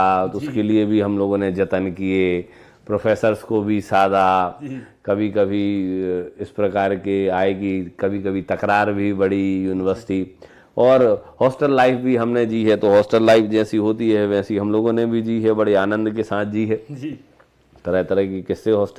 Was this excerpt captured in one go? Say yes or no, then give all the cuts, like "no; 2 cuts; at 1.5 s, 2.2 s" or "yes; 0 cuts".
yes; 0 cuts